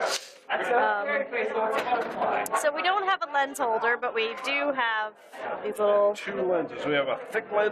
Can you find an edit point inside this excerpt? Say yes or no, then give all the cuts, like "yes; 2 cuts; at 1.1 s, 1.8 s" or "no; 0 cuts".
yes; 1 cut; at 4.7 s